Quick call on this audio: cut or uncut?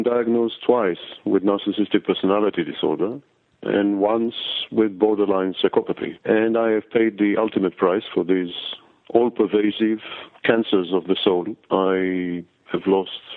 uncut